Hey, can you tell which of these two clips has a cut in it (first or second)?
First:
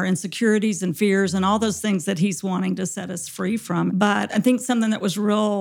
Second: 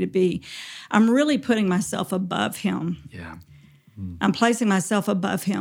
first